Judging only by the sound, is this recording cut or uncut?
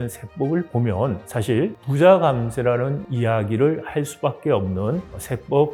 uncut